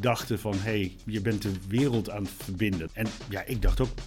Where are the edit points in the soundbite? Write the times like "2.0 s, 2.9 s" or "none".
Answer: 2.9 s